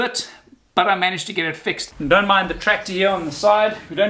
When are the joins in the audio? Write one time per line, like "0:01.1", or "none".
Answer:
0:01.8